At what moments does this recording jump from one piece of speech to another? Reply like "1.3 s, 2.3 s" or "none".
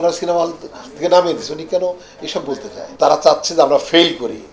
2.8 s